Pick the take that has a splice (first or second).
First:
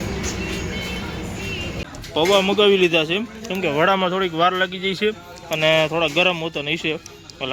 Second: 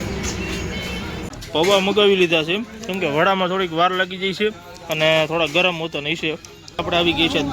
second